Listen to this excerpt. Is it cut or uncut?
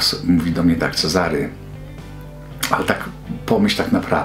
uncut